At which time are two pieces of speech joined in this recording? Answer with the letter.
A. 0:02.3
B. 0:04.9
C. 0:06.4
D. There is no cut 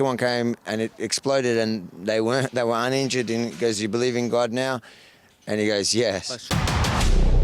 C